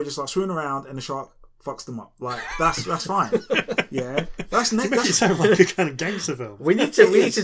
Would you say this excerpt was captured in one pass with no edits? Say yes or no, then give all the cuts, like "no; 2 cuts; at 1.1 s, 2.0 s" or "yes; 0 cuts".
no; 1 cut; at 2.1 s